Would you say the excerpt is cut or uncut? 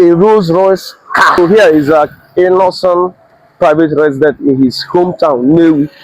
cut